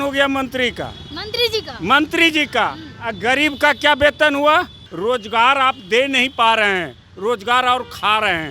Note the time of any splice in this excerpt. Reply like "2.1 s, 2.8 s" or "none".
4.8 s